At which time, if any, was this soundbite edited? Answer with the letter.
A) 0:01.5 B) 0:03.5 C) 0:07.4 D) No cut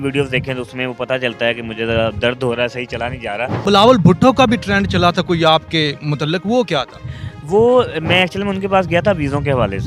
B